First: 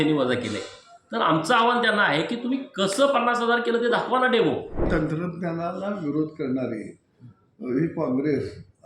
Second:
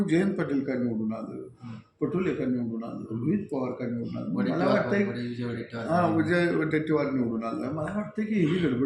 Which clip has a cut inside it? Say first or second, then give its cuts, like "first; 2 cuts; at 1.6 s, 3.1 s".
first; 1 cut; at 4.9 s